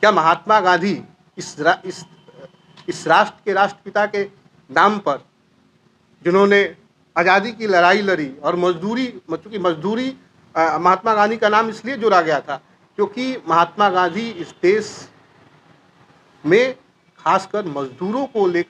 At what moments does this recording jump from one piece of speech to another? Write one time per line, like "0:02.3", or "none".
none